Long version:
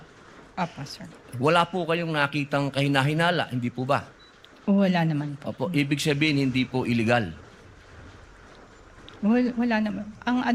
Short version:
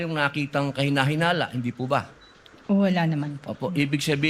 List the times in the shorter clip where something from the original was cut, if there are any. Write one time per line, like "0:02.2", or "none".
none